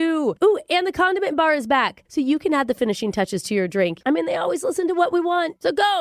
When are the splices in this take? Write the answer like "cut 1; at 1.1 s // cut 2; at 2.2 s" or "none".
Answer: cut 1; at 4.0 s